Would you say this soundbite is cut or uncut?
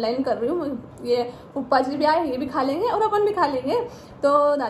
uncut